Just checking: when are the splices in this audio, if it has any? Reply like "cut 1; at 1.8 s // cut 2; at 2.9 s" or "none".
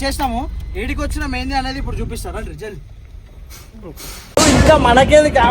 none